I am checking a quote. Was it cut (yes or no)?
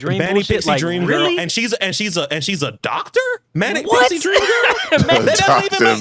yes